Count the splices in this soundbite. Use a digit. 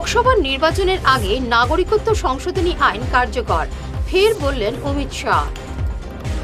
0